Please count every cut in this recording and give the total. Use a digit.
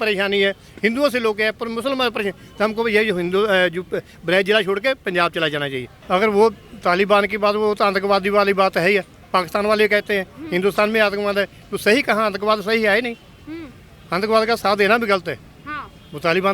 1